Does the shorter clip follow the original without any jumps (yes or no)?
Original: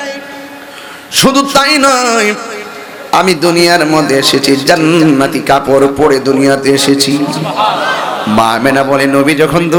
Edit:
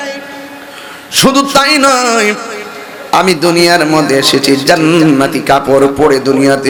yes